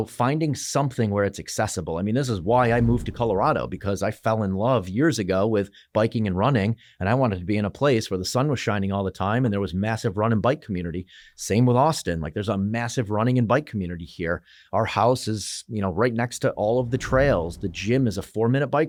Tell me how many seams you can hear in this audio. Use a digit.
0